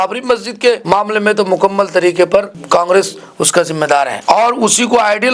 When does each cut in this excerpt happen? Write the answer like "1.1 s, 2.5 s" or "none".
4.2 s